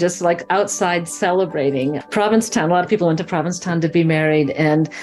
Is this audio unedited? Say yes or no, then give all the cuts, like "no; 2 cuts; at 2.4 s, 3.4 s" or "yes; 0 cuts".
yes; 0 cuts